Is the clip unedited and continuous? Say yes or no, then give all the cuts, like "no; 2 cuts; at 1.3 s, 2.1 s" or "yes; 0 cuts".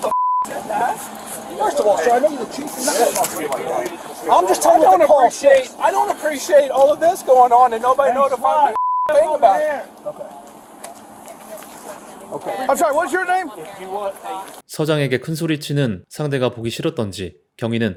yes; 0 cuts